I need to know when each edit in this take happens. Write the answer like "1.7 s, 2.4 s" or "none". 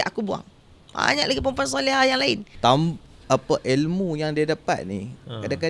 2.5 s

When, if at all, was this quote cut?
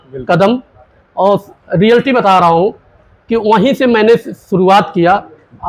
none

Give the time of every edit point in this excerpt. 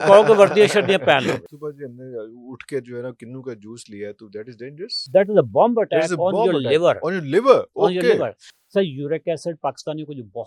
1.5 s, 5.0 s, 8.5 s

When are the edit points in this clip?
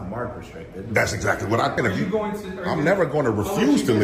1.8 s

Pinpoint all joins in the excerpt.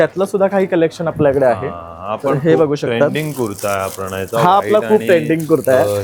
none

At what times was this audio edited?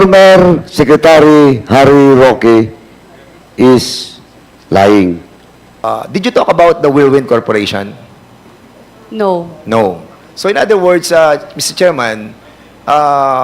5.9 s

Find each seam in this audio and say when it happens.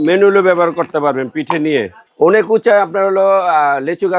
2.0 s

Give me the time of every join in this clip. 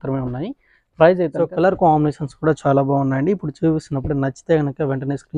1.5 s

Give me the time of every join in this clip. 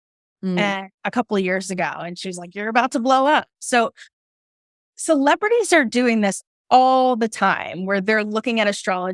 none

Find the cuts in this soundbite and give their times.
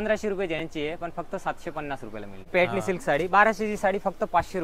2.5 s

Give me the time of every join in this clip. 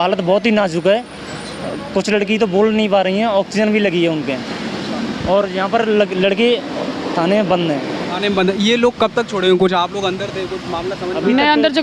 none

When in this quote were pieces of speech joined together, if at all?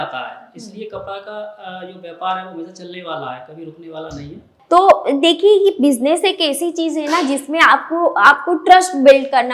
4.5 s

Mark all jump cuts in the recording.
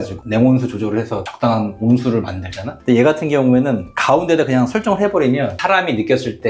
none

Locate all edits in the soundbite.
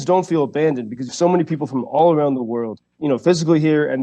1.1 s, 3.0 s

